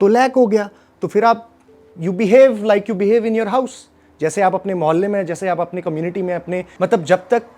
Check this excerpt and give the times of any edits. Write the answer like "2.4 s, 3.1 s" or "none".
6.7 s